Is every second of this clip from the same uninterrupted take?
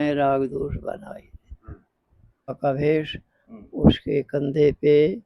no; 1 cut; at 2.6 s

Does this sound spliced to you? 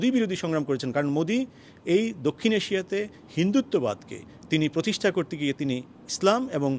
no; 0 cuts

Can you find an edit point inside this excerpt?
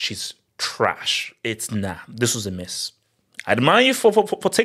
yes; 1 cut; at 1.3 s

